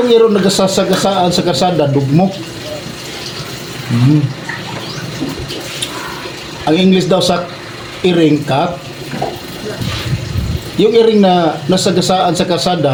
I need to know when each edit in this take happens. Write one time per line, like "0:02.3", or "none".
none